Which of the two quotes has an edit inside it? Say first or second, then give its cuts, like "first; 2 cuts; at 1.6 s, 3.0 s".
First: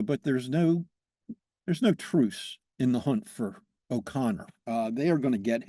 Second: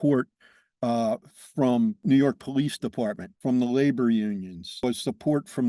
second; 3 cuts; at 2.0 s, 3.3 s, 4.8 s